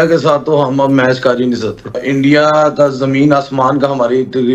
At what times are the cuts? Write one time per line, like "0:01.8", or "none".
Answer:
0:02.0

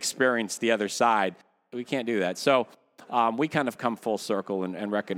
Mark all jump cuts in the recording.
none

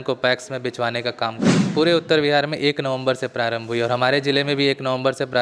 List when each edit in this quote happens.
0:01.6

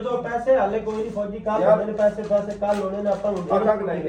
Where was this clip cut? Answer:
none

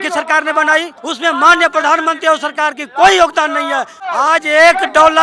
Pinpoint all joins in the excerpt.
0:01.0
0:04.0

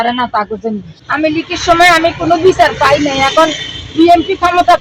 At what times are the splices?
0:00.9

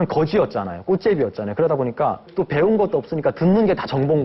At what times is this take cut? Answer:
0:02.3

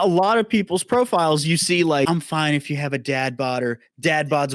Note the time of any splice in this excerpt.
0:02.1

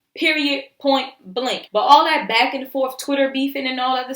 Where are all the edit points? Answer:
0:01.6

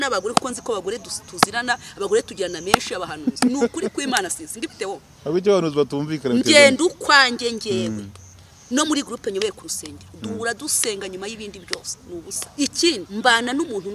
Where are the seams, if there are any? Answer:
0:12.4
0:13.1

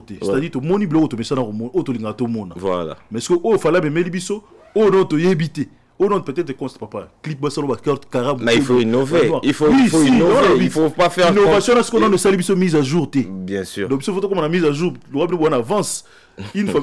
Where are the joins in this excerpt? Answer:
none

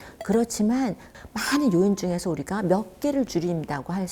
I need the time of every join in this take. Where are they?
0:01.1

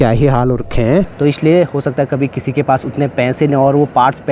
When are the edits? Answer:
0:01.1

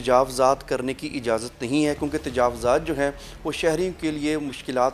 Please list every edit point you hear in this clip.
none

